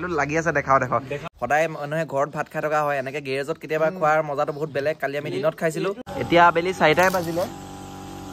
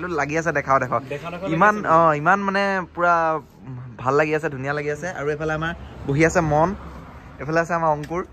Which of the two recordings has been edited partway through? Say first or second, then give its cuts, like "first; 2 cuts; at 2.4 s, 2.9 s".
first; 2 cuts; at 1.2 s, 6.0 s